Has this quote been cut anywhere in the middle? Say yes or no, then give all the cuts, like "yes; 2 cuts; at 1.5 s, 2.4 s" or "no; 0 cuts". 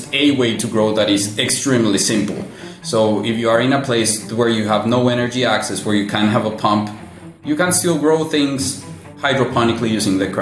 no; 0 cuts